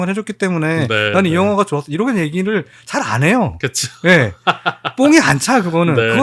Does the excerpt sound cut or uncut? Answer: uncut